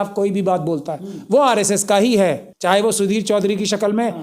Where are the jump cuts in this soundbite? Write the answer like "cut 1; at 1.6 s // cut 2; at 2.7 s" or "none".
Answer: cut 1; at 2.5 s